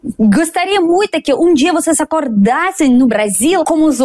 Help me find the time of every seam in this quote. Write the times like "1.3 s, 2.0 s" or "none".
none